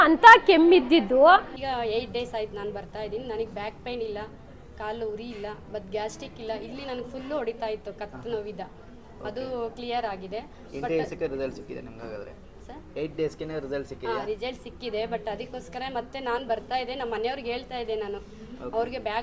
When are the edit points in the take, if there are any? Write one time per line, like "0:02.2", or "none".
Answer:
0:01.6